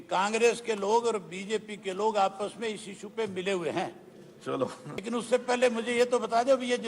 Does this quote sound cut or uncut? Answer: cut